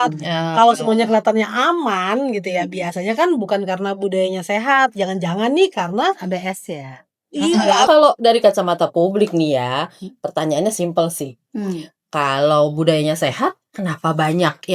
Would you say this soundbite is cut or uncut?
cut